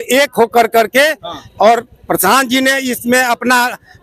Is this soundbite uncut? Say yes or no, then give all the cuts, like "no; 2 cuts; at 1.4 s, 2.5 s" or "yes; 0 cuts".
yes; 0 cuts